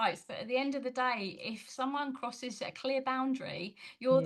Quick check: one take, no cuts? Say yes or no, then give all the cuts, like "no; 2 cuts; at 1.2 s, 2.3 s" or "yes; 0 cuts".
yes; 0 cuts